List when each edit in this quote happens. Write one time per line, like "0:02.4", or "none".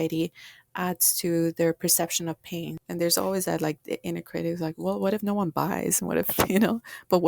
0:02.8